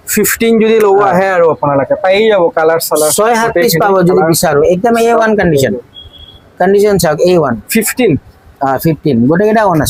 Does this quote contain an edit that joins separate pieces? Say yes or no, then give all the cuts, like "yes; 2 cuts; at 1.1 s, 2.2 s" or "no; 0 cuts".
no; 0 cuts